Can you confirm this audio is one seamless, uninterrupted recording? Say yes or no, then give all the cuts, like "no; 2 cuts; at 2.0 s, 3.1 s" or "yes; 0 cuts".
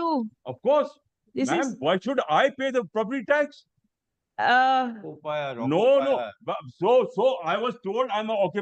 yes; 0 cuts